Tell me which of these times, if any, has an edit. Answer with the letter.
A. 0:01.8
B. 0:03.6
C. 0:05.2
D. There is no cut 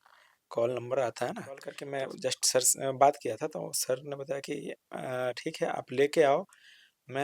A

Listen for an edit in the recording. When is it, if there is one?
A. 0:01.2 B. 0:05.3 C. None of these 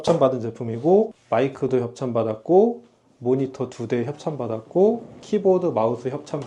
A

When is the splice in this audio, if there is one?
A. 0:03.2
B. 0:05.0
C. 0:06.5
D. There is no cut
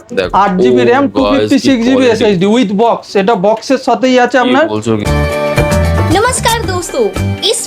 B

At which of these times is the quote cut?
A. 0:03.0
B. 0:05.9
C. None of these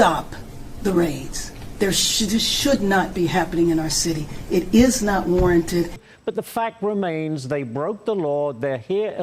B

